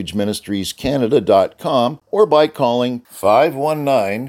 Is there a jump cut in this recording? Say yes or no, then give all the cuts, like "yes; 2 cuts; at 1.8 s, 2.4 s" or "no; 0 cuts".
yes; 1 cut; at 2.0 s